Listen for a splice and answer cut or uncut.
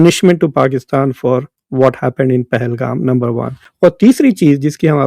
cut